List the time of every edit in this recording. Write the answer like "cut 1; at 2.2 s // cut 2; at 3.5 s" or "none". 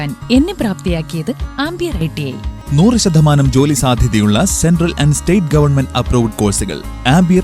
cut 1; at 2.6 s